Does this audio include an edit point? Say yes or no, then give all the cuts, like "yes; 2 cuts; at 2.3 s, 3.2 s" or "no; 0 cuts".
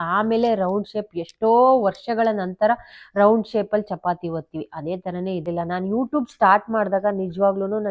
yes; 1 cut; at 5.4 s